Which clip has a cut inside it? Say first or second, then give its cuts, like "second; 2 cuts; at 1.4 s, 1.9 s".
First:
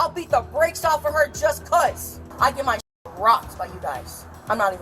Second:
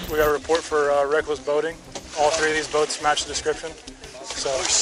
first; 1 cut; at 2.3 s